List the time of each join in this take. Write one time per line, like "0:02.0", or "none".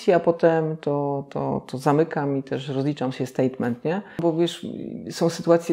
0:04.2